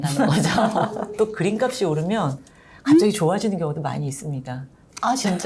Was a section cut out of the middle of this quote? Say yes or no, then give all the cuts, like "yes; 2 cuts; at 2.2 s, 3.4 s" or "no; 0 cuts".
yes; 1 cut; at 1.1 s